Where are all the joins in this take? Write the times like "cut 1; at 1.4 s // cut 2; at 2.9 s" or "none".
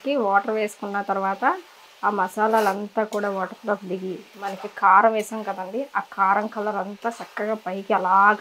none